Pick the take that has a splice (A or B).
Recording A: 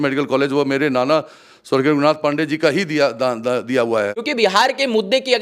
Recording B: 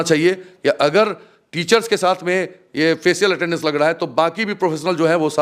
A